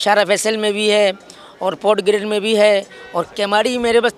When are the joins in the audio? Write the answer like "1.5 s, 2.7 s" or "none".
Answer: 3.3 s